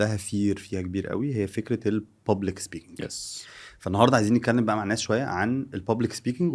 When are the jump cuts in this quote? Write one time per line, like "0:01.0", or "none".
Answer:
none